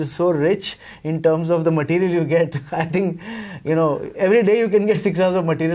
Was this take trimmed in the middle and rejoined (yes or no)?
no